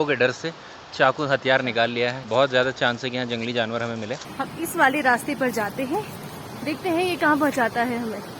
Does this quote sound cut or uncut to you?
cut